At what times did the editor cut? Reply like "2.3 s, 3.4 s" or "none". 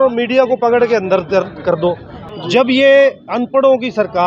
2.2 s